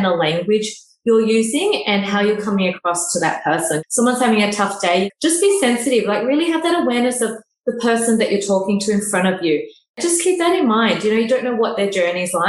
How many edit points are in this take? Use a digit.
3